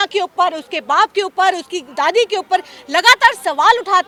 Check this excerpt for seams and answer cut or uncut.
uncut